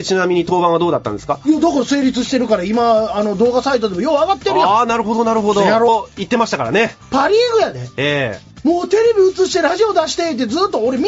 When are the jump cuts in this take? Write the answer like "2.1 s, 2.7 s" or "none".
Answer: none